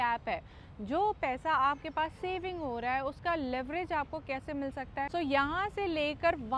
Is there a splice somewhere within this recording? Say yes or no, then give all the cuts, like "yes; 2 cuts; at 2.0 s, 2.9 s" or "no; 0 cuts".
yes; 1 cut; at 5.1 s